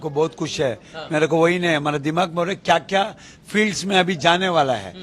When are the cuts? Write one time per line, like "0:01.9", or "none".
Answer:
none

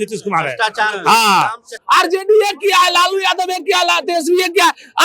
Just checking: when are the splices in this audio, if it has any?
0:01.7

